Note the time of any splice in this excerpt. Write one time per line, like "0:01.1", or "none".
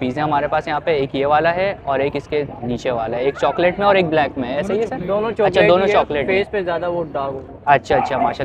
none